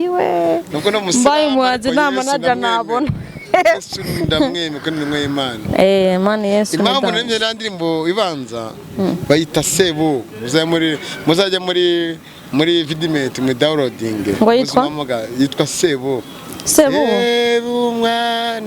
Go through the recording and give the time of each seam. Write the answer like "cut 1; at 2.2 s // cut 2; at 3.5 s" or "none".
none